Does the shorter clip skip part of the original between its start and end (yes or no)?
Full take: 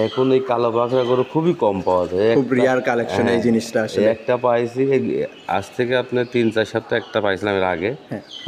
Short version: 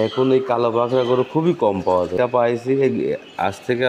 yes